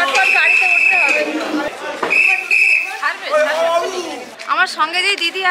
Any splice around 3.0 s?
no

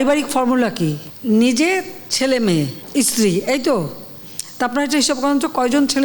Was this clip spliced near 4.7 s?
no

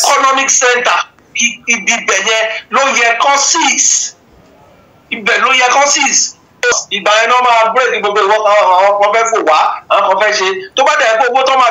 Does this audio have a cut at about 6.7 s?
yes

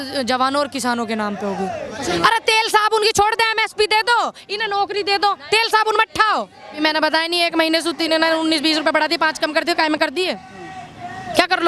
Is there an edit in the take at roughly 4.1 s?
no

